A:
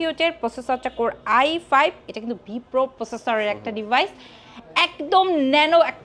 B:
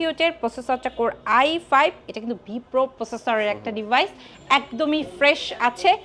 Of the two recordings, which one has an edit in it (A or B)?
B